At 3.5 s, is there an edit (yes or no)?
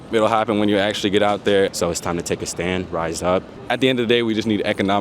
yes